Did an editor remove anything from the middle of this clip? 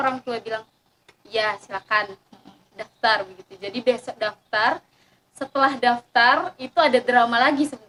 no; 0 cuts

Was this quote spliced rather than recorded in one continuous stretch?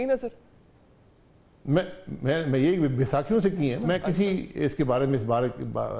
yes; 1 cut; at 3.8 s

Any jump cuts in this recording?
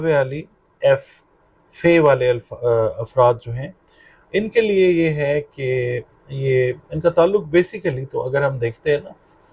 no; 0 cuts

